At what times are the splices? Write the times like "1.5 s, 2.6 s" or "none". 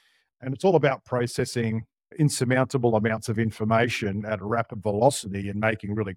none

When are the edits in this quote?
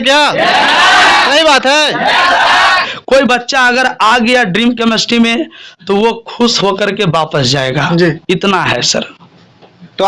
2.9 s

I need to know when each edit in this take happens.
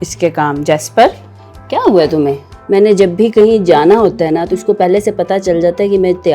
2.5 s

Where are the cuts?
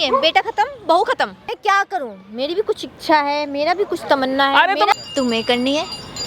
1.4 s, 4.9 s

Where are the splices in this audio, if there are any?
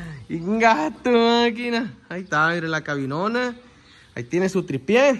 none

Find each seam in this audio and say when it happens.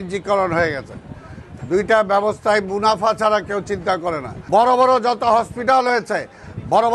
4.3 s

